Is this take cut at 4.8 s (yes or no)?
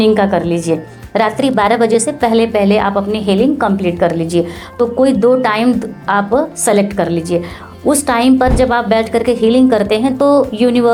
no